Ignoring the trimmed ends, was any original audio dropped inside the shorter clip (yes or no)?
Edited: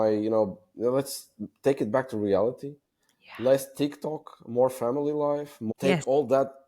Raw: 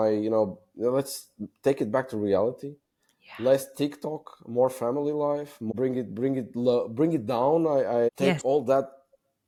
yes